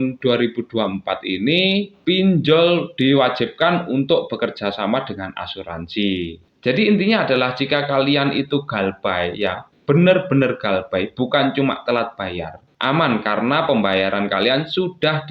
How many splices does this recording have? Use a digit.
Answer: 3